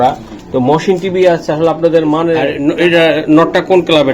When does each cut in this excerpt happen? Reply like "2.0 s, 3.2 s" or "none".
2.5 s